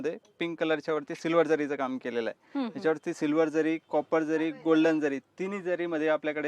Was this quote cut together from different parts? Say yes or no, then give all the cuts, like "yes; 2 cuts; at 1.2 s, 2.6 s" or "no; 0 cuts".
no; 0 cuts